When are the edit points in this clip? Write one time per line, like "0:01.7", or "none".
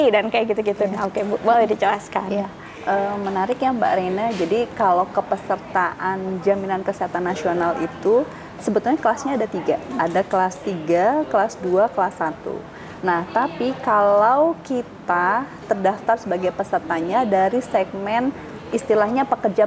none